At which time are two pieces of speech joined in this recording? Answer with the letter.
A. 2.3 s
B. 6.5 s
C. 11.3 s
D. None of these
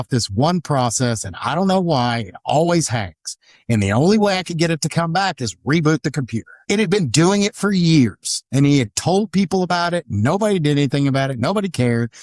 B